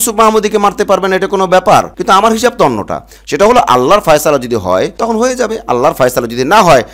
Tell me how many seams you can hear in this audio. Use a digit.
1